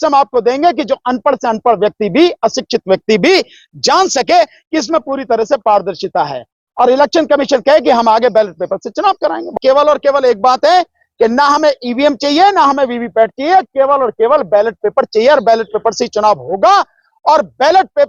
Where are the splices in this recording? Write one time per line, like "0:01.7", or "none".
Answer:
0:09.4